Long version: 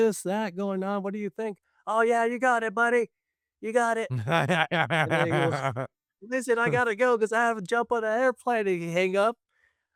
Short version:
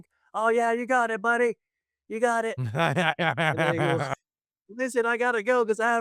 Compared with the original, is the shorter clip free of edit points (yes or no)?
yes